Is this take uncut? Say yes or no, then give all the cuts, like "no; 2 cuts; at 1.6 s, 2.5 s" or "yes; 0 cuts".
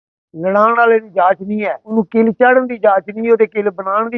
no; 1 cut; at 1.9 s